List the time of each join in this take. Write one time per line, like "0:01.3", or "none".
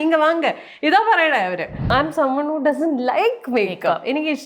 0:01.9